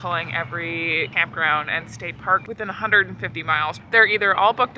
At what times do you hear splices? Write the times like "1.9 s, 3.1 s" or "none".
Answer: 1.1 s, 3.8 s